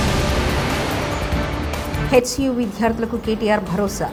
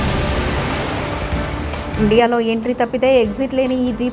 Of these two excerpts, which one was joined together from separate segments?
second; 1 cut; at 1.9 s

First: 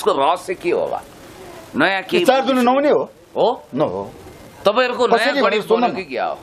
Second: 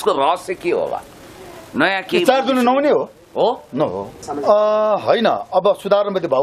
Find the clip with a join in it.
second; 1 cut; at 4.2 s

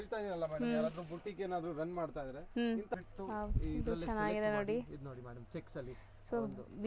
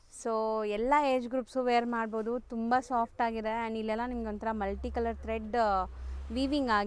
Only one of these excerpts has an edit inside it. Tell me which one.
first; 1 cut; at 2.9 s

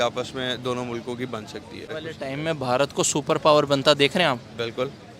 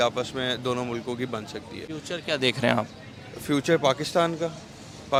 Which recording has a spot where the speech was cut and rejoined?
first; 1 cut; at 1.9 s

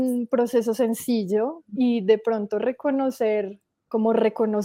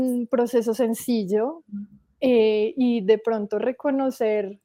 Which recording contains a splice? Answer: first; 2 cuts; at 1.7 s, 3.9 s

